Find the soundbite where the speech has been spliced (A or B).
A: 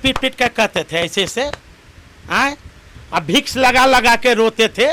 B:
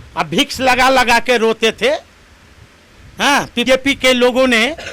B